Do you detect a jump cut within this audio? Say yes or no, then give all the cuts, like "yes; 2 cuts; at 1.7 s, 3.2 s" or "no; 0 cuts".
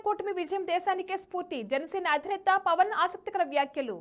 no; 0 cuts